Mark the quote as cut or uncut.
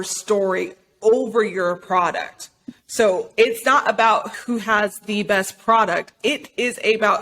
cut